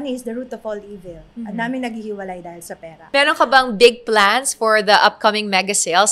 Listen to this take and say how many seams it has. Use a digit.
1